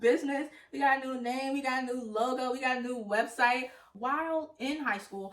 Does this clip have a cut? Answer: yes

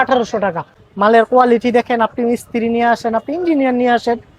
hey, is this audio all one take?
no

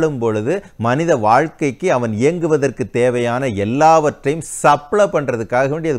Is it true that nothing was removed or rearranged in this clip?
yes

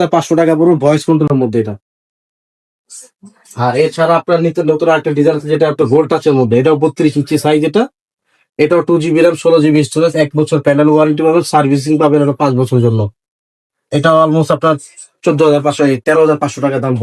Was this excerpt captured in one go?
yes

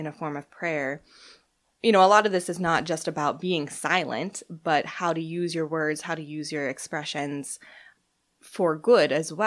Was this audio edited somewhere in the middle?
yes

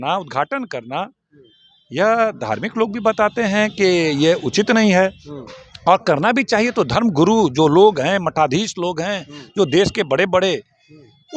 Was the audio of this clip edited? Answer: no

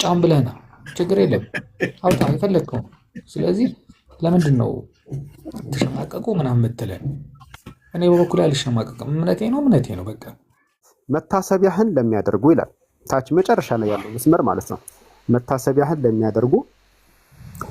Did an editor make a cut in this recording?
yes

